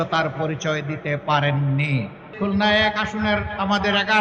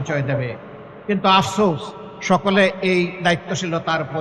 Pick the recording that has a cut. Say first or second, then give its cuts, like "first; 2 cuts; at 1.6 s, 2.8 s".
first; 1 cut; at 2.2 s